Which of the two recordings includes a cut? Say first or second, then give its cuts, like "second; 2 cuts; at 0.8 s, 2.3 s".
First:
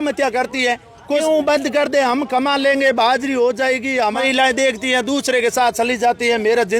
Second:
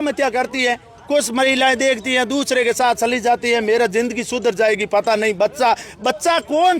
first; 2 cuts; at 1.2 s, 4.0 s